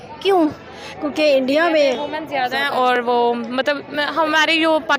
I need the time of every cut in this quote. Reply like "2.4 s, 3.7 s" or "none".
none